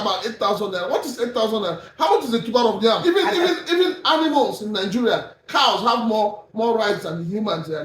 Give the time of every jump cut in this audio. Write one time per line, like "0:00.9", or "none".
0:03.0